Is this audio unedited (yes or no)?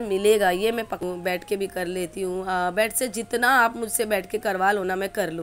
no